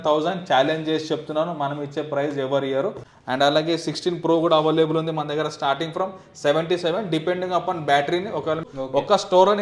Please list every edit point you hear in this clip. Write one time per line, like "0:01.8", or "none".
0:03.1
0:08.7